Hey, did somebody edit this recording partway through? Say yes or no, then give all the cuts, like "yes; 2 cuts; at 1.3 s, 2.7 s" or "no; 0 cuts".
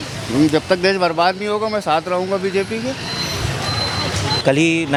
no; 0 cuts